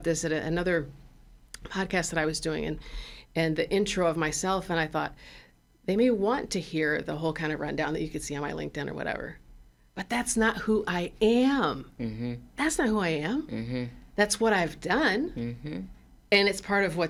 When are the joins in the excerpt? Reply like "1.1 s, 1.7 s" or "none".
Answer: none